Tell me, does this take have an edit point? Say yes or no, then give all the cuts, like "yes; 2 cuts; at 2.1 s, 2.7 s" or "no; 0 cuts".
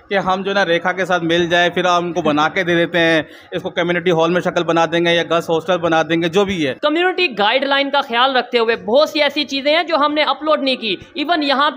yes; 1 cut; at 6.8 s